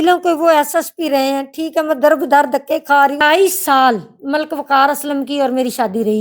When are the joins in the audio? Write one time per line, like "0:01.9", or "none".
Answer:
0:03.2